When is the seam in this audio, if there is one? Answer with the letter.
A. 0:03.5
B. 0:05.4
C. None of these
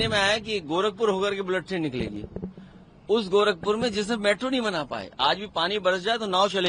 C